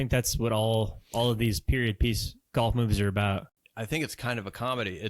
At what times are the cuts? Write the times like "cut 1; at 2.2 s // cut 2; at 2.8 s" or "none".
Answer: cut 1; at 3.5 s